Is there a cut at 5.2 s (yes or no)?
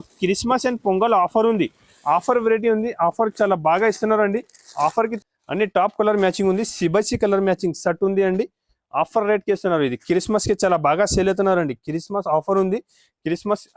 yes